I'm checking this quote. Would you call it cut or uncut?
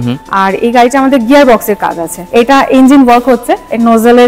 cut